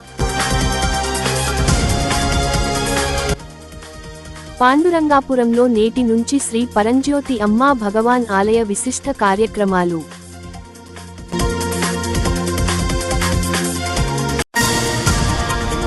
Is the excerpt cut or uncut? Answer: cut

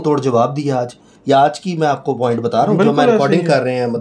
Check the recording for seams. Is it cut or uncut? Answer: uncut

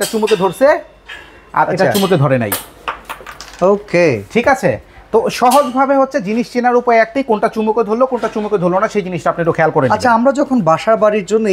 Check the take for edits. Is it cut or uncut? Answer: uncut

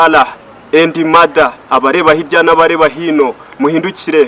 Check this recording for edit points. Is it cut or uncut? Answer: uncut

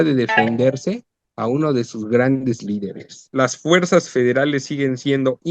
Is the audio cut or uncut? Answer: cut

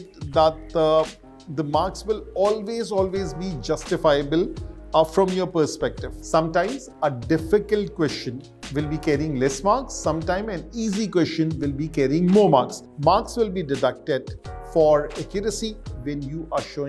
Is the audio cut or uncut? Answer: cut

